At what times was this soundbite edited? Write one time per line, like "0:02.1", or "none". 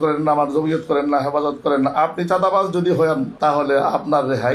0:03.3